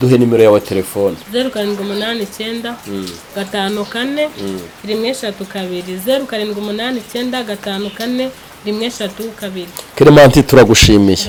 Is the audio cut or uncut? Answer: uncut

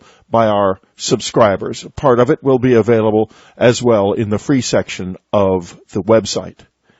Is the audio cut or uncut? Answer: cut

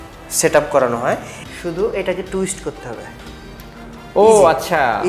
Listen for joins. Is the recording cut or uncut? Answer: cut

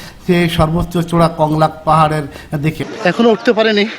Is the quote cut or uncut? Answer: cut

